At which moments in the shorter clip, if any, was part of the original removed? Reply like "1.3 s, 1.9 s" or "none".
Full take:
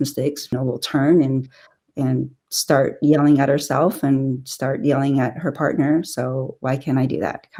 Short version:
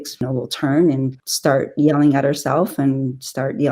1.2 s